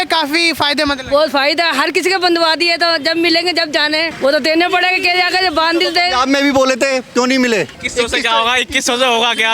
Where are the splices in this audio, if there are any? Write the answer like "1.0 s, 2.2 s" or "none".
4.1 s, 7.8 s

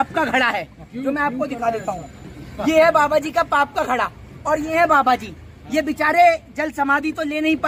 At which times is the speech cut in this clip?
none

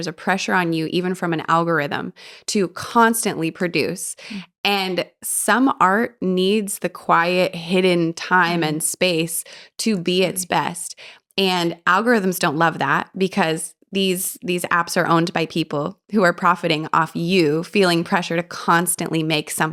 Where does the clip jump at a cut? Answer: none

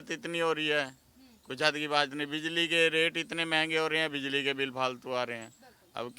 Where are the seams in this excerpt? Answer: none

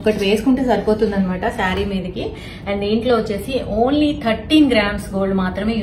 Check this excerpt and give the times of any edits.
none

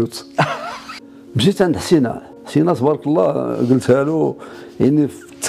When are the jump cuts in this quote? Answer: 0.9 s

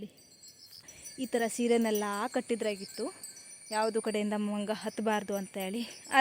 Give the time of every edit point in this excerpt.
1.0 s

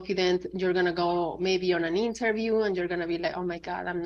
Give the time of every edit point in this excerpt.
none

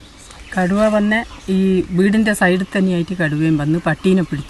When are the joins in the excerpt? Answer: none

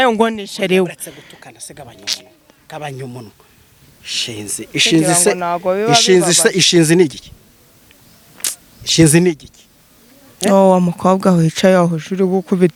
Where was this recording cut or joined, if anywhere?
none

